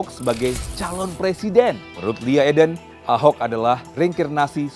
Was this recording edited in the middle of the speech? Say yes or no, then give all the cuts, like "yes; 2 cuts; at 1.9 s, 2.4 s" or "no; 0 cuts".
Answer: yes; 3 cuts; at 1.9 s, 2.9 s, 3.9 s